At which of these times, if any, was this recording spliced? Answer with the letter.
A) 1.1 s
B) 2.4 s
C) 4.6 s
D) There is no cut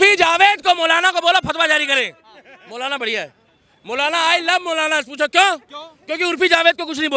D